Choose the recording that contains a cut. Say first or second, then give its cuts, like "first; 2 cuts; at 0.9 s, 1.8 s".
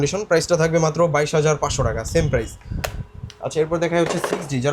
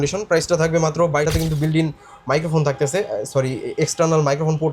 second; 1 cut; at 1.3 s